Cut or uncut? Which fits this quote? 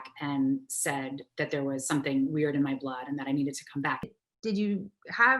cut